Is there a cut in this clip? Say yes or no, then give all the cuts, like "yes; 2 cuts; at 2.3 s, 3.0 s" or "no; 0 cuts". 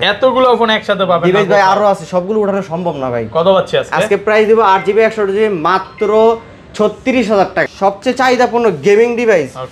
yes; 1 cut; at 7.7 s